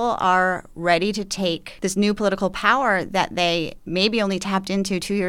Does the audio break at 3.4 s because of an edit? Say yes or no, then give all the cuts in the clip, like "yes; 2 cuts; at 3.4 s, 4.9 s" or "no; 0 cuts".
no; 1 cut; at 1.7 s